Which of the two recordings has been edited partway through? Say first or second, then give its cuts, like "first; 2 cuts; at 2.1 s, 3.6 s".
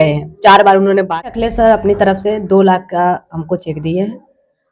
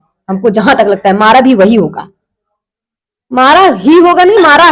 first; 1 cut; at 1.2 s